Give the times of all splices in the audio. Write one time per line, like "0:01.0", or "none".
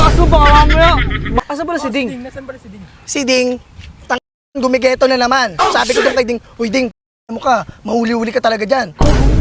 0:01.4